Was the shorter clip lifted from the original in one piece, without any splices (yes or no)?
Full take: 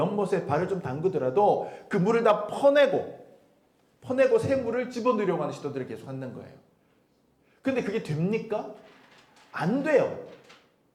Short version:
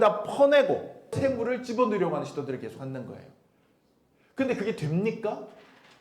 no